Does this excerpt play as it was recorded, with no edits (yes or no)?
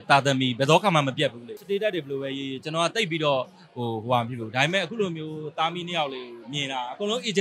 no